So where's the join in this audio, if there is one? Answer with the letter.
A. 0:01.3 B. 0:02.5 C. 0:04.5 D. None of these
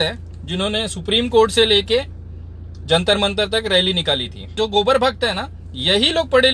C